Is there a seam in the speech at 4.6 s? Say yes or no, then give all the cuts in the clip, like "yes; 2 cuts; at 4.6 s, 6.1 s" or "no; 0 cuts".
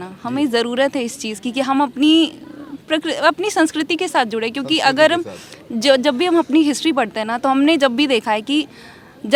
no; 0 cuts